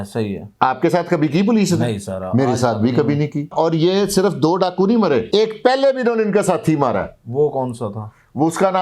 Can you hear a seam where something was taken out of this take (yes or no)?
yes